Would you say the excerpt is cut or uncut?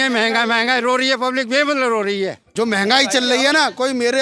cut